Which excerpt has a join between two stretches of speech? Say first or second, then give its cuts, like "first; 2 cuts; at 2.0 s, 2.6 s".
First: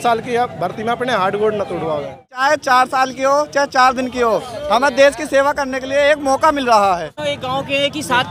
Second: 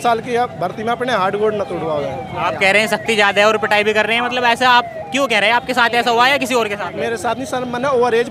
first; 2 cuts; at 2.4 s, 7.1 s